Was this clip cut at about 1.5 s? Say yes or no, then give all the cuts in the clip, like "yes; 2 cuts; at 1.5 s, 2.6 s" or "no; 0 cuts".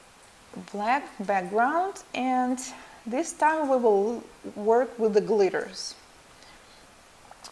no; 1 cut; at 6.4 s